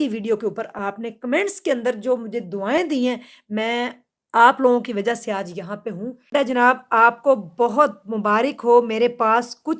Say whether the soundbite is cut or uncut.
cut